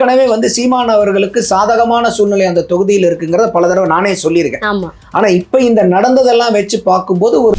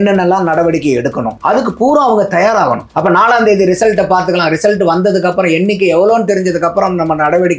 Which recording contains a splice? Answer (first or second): second